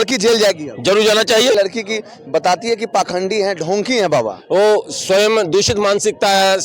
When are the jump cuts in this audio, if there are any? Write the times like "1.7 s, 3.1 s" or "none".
1.5 s

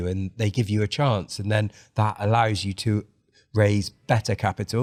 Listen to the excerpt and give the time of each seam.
none

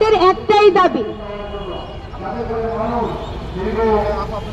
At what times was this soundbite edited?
none

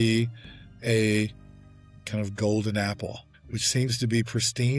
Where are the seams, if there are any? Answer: 2.0 s

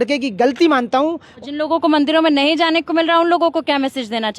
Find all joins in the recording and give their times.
1.3 s

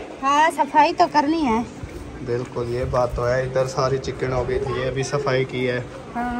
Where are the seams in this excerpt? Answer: none

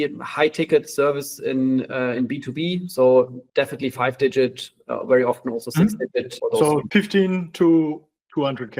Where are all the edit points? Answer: 3.4 s, 6.4 s

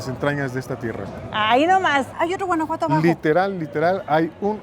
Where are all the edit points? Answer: 2.1 s

